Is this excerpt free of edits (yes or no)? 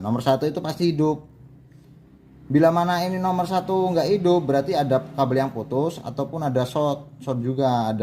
yes